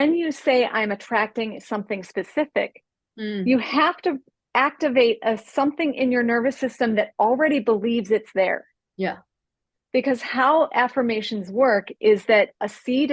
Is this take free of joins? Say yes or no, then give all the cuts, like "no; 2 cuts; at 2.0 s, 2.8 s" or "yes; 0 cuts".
yes; 0 cuts